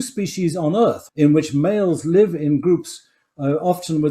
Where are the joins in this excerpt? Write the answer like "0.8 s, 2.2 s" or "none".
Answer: 1.0 s